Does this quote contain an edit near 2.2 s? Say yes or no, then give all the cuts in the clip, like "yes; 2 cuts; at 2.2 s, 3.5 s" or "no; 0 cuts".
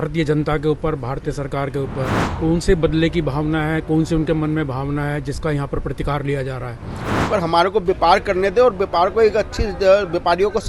yes; 2 cuts; at 2.2 s, 7.1 s